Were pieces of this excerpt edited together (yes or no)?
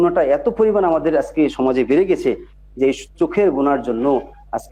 no